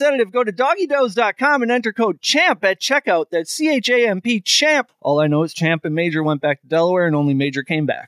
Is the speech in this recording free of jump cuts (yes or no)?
no